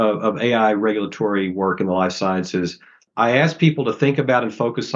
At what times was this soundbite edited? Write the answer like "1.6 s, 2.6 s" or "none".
3.0 s